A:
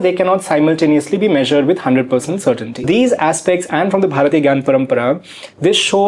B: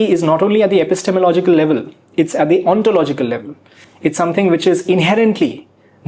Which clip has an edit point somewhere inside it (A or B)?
A